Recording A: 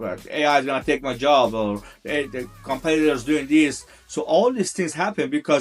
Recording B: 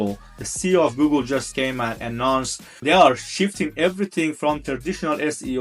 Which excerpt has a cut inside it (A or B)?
B